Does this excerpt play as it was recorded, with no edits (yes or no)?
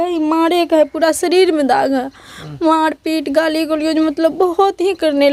yes